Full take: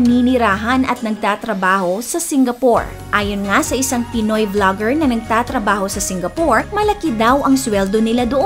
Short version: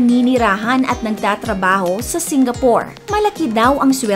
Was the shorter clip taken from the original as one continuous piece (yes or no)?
no